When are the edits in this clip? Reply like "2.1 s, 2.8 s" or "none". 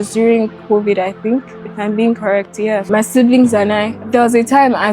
2.8 s, 4.0 s